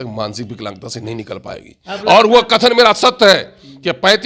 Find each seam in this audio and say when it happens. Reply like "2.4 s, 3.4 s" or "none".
none